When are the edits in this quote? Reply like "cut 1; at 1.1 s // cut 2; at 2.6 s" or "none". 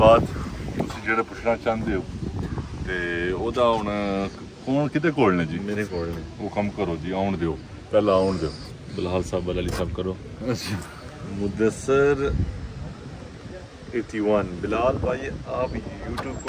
none